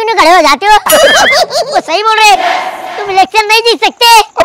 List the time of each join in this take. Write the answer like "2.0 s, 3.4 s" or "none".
1.6 s

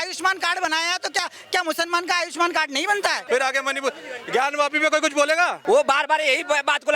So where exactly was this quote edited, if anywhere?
3.2 s, 5.6 s

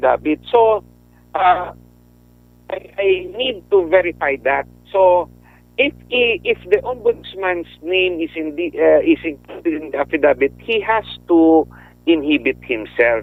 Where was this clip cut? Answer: none

